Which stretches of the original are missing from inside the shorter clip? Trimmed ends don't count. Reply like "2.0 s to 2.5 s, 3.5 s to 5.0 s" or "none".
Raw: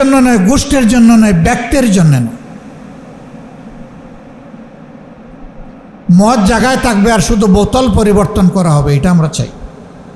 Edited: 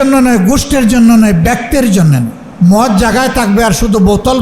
2.4 s to 5.9 s

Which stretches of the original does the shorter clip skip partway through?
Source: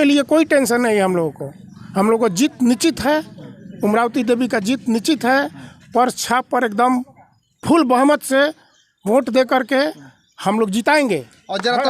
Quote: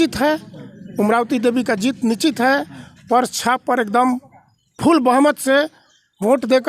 none

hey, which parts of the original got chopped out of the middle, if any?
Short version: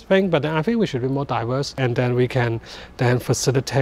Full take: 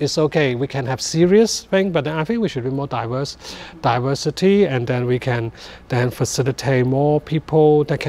3.4 s to 4.7 s

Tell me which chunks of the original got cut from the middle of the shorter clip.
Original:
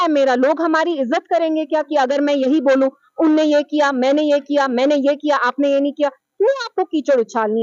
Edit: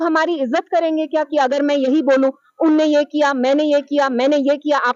none

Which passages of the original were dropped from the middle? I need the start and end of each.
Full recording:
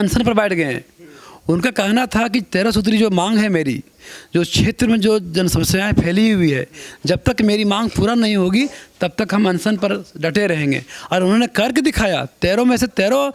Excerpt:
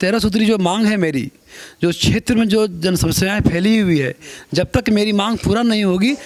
none

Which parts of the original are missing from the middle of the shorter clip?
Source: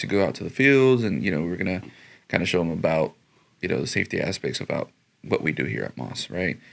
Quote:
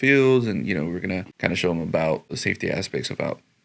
1.9 s to 2.2 s, 3.3 s to 3.9 s

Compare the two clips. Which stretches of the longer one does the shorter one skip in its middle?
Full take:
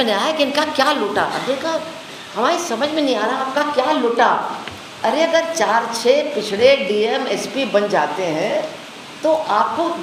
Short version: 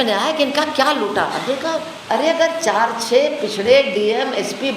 1.9 s to 4.9 s

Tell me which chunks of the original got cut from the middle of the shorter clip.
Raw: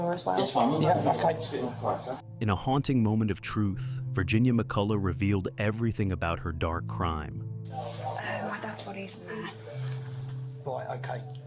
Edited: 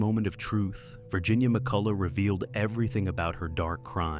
none

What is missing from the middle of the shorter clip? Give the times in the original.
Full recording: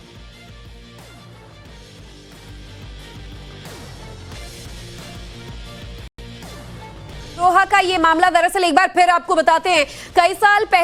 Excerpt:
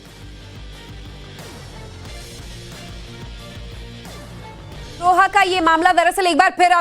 6.1 s to 6.2 s

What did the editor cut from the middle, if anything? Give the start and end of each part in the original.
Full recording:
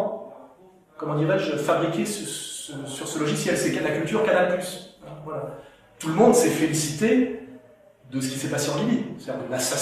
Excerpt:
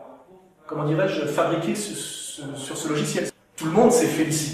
3.6 s to 5.7 s

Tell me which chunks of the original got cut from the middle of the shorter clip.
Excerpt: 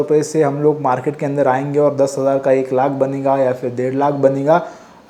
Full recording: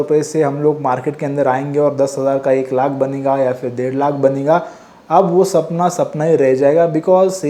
none

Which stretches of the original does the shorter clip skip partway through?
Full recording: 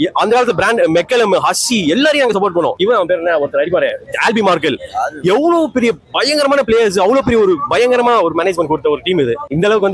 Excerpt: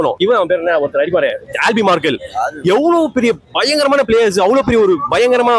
none

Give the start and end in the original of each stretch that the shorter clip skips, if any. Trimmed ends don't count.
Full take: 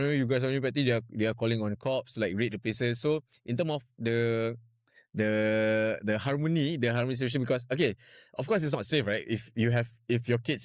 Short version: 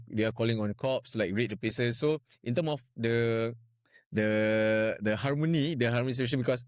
none

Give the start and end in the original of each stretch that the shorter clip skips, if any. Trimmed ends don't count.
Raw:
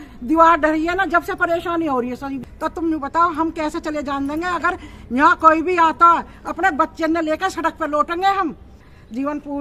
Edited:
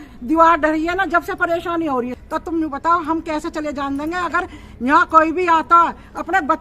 2.2 s to 2.5 s

